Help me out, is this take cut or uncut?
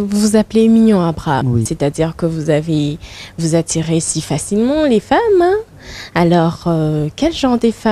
uncut